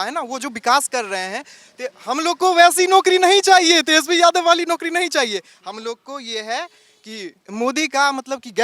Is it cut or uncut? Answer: cut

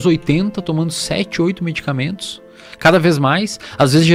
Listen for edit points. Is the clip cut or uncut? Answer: uncut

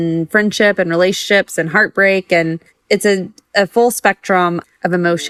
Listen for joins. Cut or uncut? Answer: uncut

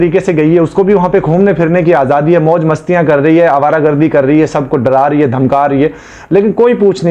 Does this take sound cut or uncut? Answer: uncut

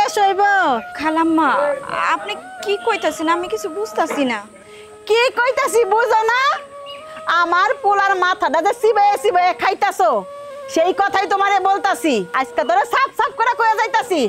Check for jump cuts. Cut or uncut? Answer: cut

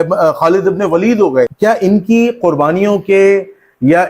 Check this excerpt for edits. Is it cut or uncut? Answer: cut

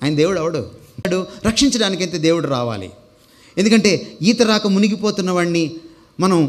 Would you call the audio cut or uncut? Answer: cut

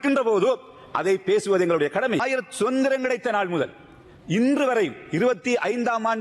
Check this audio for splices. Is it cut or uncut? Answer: cut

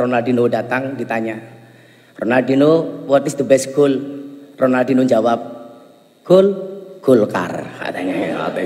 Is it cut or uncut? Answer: uncut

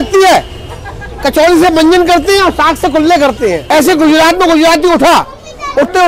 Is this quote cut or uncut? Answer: uncut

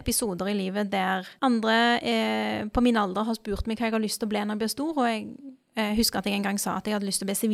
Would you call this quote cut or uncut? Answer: cut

